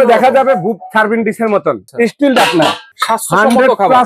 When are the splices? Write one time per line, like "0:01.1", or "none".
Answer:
0:01.9
0:02.9